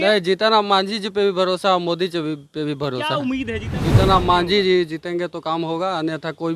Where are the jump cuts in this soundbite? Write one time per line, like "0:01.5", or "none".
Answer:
0:03.7